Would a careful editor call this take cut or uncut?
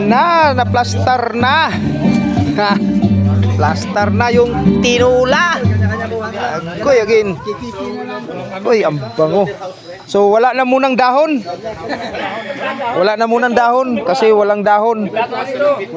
uncut